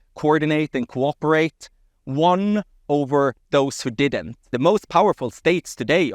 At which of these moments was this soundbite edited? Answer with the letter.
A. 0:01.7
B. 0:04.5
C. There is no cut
B